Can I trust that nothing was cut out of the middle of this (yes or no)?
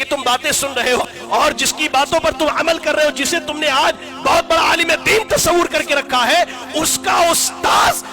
no